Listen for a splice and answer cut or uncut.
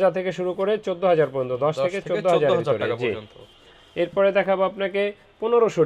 uncut